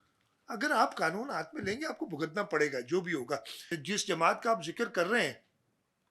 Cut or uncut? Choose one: cut